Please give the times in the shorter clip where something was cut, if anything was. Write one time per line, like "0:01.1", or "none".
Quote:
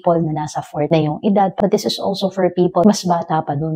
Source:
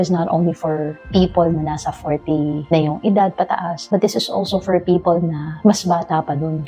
0:00.9
0:01.5
0:02.8